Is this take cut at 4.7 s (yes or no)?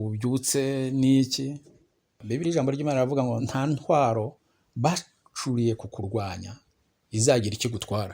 no